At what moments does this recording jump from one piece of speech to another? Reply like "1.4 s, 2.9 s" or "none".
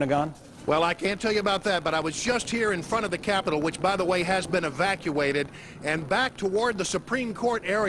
none